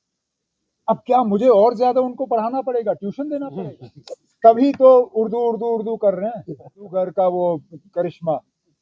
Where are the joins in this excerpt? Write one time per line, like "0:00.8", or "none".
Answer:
0:03.6
0:06.9